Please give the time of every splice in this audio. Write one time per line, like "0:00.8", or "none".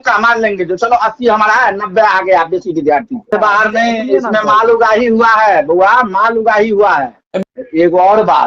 0:03.3
0:07.2